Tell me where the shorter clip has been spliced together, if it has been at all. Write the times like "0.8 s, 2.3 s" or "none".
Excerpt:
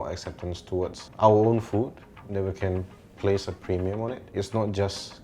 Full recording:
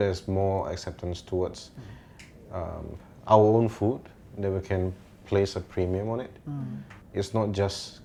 1.0 s, 4.2 s